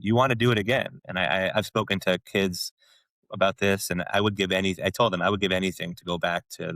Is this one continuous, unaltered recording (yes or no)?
no